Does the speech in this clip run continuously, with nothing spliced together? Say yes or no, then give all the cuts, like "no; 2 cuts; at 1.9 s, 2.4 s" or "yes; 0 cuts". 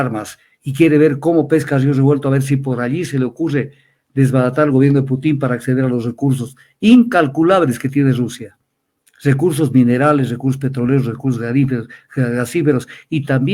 yes; 0 cuts